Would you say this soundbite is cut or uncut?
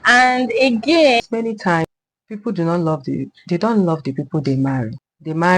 cut